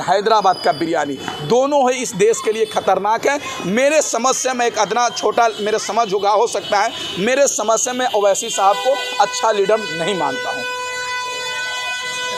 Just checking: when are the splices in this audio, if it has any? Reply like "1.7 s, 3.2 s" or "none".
none